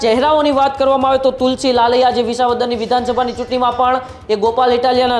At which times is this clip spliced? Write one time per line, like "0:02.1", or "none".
none